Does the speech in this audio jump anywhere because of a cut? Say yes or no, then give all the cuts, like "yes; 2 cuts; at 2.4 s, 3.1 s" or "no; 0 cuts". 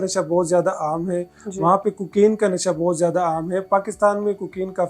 no; 0 cuts